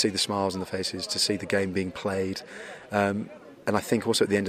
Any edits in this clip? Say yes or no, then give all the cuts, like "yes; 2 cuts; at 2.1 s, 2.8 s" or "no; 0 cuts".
no; 0 cuts